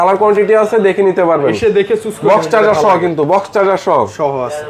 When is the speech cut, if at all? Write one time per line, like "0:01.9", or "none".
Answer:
none